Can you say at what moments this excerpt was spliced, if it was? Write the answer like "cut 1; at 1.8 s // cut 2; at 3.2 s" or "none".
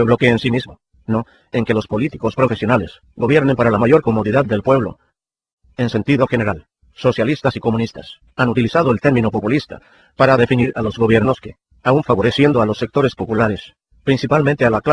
cut 1; at 11.8 s